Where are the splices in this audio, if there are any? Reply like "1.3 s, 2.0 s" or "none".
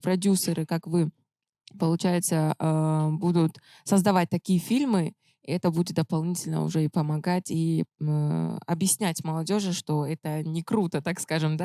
none